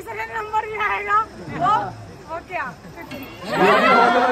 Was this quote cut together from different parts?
no; 0 cuts

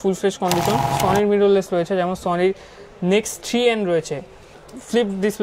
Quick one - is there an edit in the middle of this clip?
yes; 2 cuts; at 0.9 s, 4.5 s

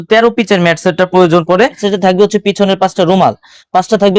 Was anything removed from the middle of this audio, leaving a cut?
yes; 1 cut; at 1.8 s

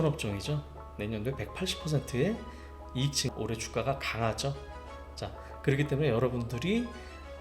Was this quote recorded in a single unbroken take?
no; 1 cut; at 3.3 s

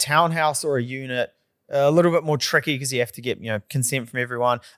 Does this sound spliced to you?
no; 0 cuts

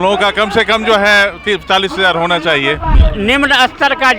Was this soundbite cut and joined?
yes; 1 cut; at 3.0 s

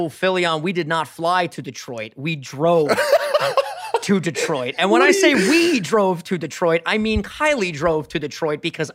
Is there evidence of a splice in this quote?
no; 0 cuts

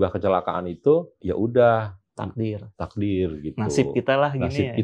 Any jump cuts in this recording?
yes; 1 cut; at 1.2 s

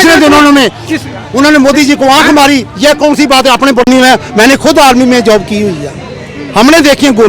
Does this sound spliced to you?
yes; 1 cut; at 3.8 s

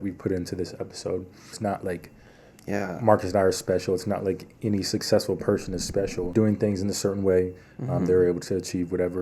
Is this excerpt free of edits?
no; 2 cuts; at 1.6 s, 6.3 s

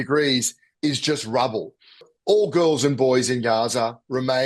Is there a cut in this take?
yes; 1 cut; at 2.1 s

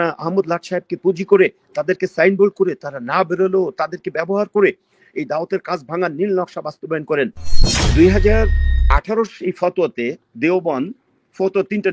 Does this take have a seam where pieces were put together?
yes; 1 cut; at 7.5 s

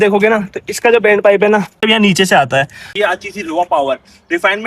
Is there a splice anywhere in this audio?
yes; 2 cuts; at 1.8 s, 2.8 s

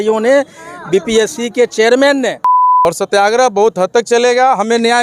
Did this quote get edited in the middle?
yes; 1 cut; at 2.8 s

